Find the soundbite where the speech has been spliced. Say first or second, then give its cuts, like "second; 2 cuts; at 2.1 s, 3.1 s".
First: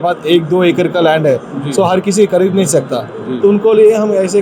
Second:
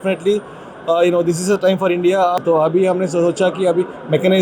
second; 1 cut; at 2.4 s